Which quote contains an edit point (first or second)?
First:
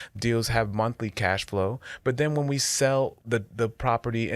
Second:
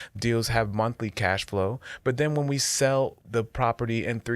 second